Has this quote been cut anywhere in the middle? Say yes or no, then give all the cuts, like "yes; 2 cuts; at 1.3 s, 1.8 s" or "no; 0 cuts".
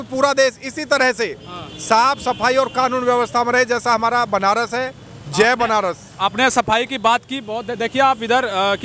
no; 0 cuts